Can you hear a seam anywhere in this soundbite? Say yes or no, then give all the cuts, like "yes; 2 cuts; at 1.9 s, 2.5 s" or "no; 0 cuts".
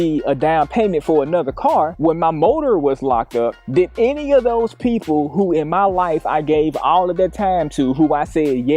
yes; 1 cut; at 1.9 s